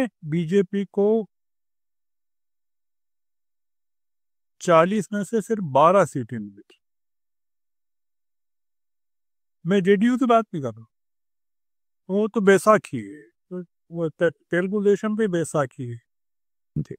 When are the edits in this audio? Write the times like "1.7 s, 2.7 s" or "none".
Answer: none